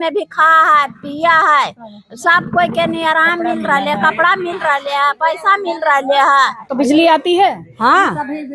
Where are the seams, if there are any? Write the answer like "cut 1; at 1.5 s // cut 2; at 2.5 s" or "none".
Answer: cut 1; at 6.6 s

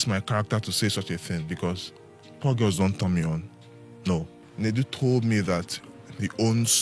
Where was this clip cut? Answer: cut 1; at 4.4 s

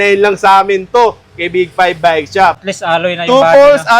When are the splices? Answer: cut 1; at 2.6 s

